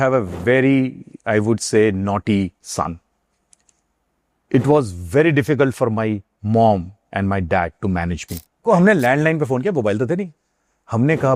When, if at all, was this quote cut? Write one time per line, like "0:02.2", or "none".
0:08.6